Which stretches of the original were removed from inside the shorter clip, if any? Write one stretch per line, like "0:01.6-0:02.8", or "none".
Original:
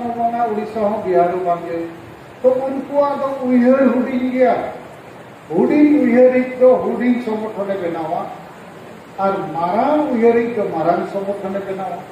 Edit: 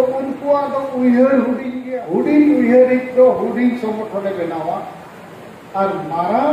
0:04.2-0:05.2